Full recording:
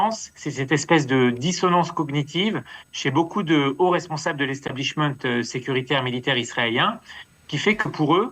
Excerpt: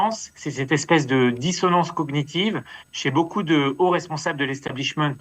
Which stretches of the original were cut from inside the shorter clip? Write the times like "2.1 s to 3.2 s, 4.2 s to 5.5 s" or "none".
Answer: none